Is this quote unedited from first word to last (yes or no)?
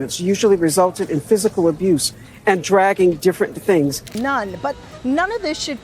no